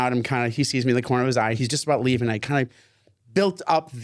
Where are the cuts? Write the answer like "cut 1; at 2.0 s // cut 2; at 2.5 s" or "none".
cut 1; at 1.6 s